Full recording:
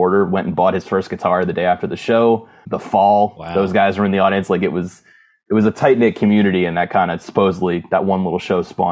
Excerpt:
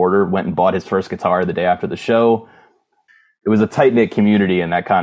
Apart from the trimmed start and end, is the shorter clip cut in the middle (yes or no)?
yes